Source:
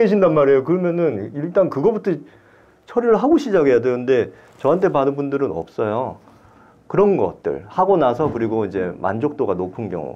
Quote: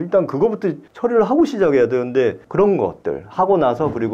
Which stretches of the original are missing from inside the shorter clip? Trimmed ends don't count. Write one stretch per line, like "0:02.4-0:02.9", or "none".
0:02.3-0:02.8
0:04.4-0:06.8